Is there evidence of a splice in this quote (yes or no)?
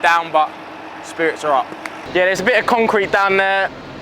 yes